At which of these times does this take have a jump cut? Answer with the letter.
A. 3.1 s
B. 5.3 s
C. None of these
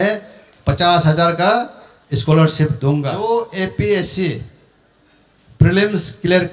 A